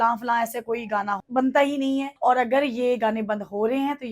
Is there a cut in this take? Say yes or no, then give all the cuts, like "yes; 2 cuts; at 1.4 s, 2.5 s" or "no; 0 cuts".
yes; 2 cuts; at 1.2 s, 2.1 s